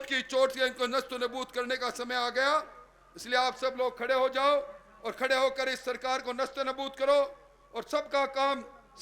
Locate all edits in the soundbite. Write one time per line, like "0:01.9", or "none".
none